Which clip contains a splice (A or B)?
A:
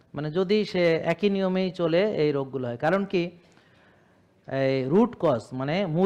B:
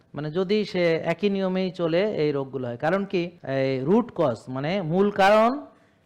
B